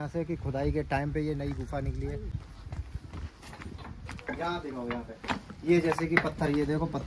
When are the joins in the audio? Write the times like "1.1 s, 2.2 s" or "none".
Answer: 2.5 s